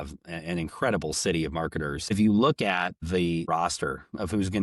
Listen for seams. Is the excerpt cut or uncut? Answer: cut